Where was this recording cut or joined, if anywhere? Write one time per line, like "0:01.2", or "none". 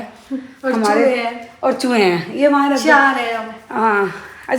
none